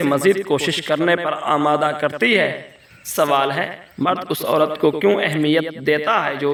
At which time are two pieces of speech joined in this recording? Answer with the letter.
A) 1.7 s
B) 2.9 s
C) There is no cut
C